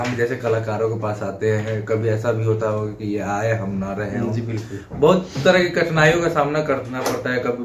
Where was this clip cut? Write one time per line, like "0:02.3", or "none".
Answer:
none